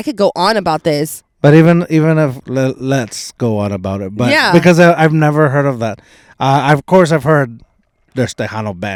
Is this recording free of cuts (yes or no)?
yes